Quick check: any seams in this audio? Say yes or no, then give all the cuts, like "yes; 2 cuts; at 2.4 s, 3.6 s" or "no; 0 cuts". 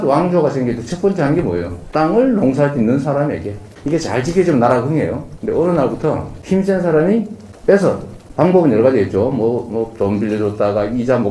no; 0 cuts